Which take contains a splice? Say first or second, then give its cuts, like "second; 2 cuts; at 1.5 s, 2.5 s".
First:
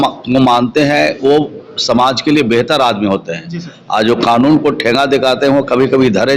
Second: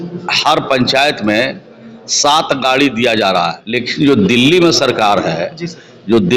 second; 1 cut; at 3.6 s